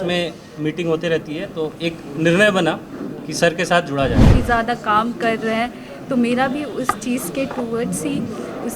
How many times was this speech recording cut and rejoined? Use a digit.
1